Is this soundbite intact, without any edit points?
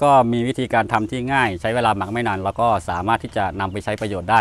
yes; 0 cuts

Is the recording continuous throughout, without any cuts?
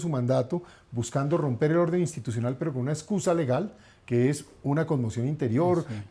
yes; 0 cuts

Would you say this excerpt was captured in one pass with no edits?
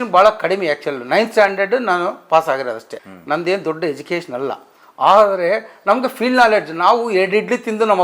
yes; 0 cuts

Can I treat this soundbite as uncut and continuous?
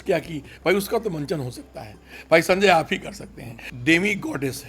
no; 1 cut; at 3.7 s

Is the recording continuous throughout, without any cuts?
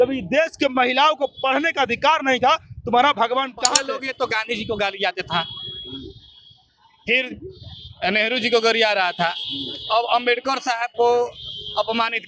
no; 1 cut; at 3.8 s

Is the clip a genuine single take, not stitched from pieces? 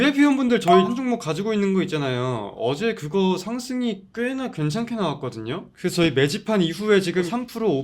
no; 1 cut; at 0.9 s

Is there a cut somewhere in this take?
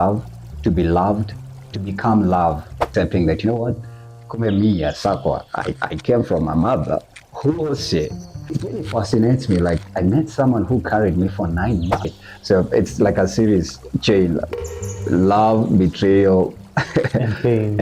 yes; 2 cuts; at 2.8 s, 12.3 s

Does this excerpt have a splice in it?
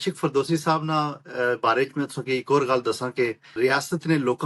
yes; 1 cut; at 3.4 s

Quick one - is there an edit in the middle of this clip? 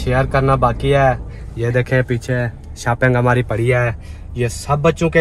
no; 0 cuts

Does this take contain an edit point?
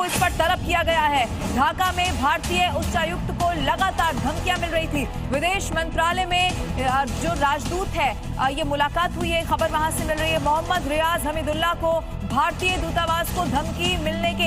no; 0 cuts

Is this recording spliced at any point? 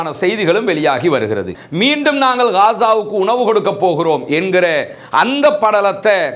yes; 1 cut; at 1.5 s

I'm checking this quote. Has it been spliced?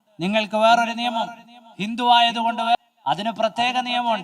yes; 1 cut; at 2.8 s

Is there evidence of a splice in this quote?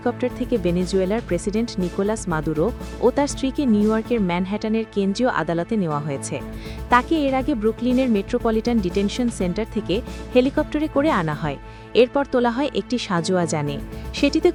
no; 0 cuts

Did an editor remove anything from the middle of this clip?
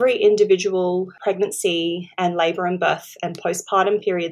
yes; 1 cut; at 1.1 s

